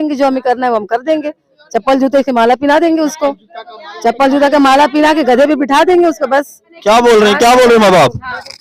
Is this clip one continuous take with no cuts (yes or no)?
yes